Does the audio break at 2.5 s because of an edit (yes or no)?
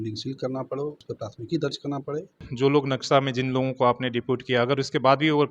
yes